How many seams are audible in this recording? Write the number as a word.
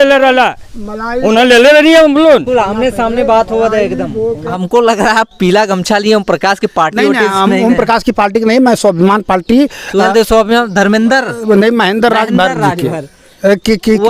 one